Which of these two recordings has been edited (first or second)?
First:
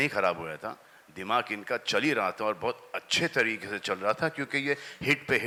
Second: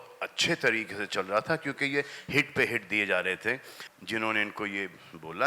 second